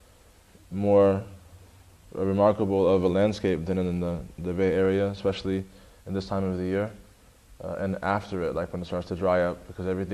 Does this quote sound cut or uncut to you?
cut